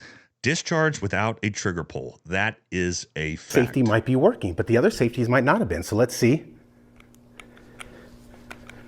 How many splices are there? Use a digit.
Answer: 1